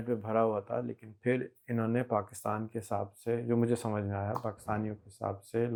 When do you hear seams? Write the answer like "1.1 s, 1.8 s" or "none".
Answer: none